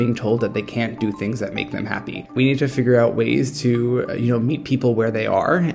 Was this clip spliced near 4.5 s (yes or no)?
no